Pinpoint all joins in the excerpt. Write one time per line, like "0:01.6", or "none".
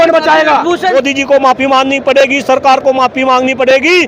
0:00.9

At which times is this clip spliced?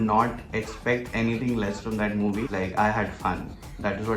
0:02.5

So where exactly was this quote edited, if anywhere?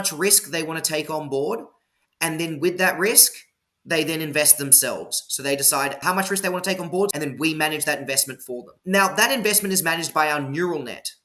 0:06.0
0:07.1
0:08.7

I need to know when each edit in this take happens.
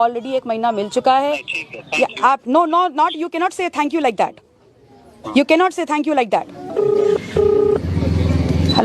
0:06.6

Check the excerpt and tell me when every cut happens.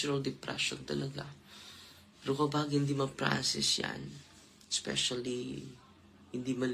none

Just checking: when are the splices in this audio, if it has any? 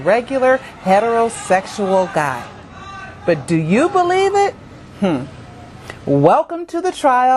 none

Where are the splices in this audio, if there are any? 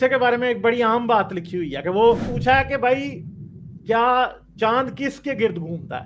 0:02.3

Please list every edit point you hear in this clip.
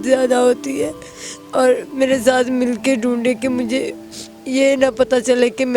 none

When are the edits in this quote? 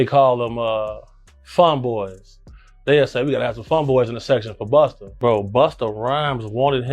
0:05.0

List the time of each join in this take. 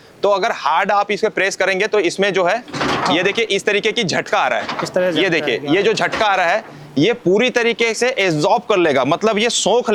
none

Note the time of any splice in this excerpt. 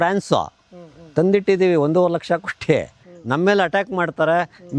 0:03.1

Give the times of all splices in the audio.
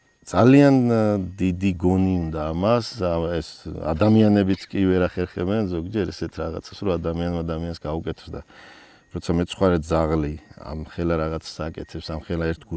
none

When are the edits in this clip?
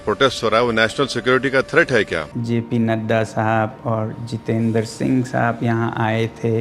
0:02.3

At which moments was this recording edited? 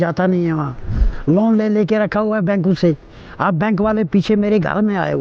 0:01.1

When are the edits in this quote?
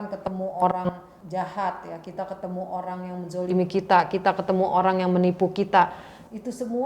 0:01.0

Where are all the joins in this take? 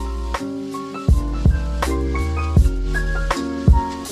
none

